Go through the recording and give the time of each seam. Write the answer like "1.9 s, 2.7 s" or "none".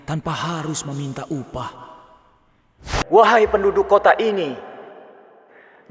3.0 s